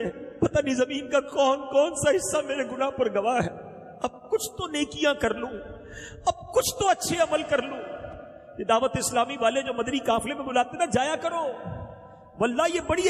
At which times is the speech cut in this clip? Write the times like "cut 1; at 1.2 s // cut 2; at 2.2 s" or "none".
none